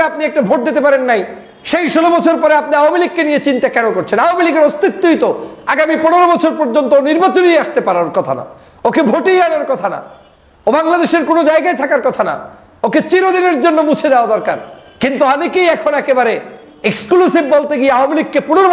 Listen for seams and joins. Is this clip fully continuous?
yes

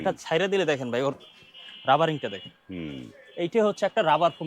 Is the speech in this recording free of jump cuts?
yes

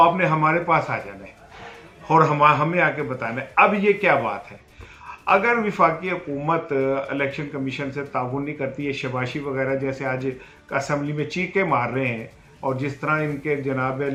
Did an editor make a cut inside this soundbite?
no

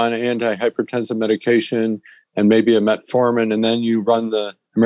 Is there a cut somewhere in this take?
no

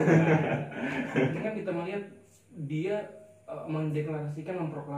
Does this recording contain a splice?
yes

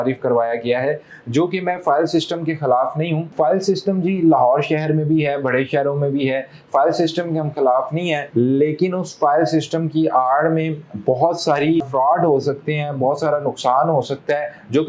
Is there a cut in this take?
no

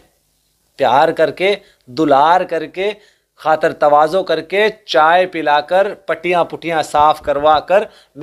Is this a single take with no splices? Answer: yes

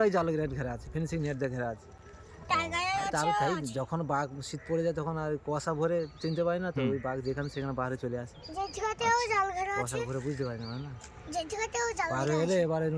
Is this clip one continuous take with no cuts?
yes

